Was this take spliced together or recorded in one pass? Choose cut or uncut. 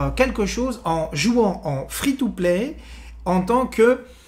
uncut